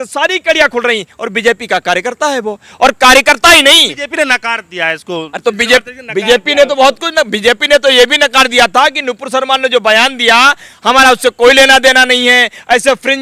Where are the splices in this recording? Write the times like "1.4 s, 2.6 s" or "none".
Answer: none